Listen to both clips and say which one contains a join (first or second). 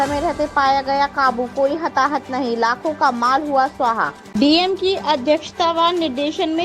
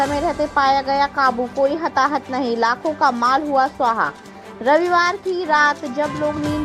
first